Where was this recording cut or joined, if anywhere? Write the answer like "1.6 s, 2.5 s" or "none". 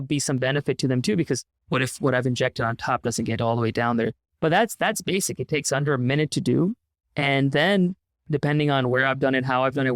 1.5 s